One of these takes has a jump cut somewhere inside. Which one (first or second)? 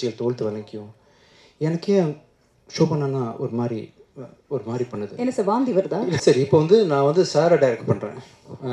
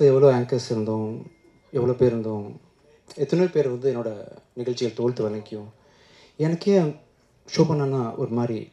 first